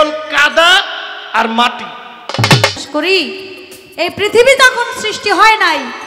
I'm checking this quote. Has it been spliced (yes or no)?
yes